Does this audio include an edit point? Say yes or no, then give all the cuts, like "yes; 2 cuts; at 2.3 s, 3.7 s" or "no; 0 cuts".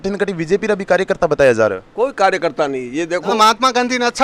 yes; 1 cut; at 3.3 s